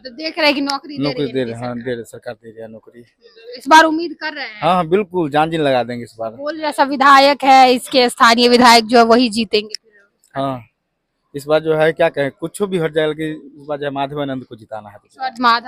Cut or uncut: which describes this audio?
uncut